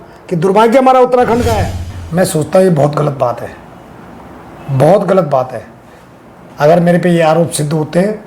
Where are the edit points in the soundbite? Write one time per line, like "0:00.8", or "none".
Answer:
0:02.0